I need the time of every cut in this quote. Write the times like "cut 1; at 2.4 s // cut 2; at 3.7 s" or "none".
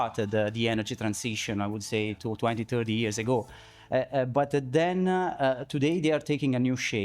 none